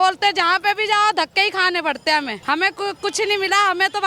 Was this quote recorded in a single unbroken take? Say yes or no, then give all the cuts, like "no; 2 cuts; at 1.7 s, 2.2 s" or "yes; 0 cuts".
no; 1 cut; at 2.3 s